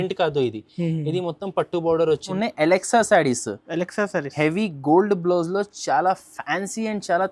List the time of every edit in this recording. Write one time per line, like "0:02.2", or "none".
0:02.3